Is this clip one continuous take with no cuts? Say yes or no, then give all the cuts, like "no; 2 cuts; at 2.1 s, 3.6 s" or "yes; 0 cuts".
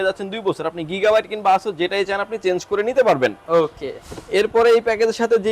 yes; 0 cuts